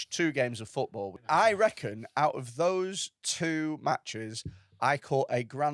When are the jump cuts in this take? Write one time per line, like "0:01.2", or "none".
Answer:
0:01.2